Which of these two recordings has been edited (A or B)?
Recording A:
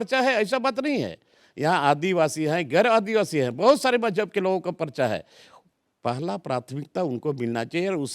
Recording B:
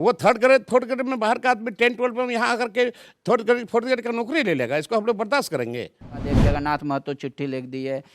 B